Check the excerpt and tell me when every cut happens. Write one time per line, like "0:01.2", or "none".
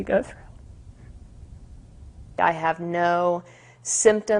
0:02.2